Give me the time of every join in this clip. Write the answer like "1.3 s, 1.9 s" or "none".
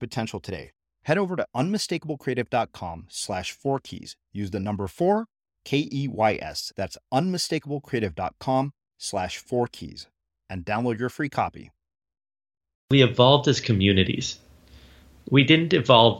12.9 s